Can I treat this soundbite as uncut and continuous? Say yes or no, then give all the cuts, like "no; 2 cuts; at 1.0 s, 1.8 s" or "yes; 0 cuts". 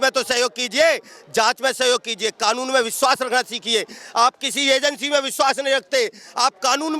yes; 0 cuts